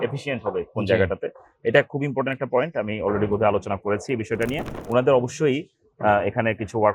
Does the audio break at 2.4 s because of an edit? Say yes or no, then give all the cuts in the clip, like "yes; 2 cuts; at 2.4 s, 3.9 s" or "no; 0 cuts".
no; 1 cut; at 4.7 s